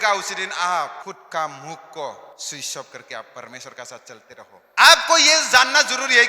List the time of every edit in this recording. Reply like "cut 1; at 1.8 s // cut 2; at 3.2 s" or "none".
cut 1; at 1.0 s // cut 2; at 2.3 s // cut 3; at 4.6 s

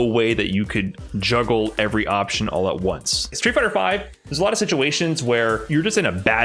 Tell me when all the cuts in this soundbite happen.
cut 1; at 3.3 s

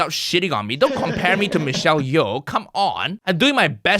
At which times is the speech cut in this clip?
cut 1; at 3.1 s

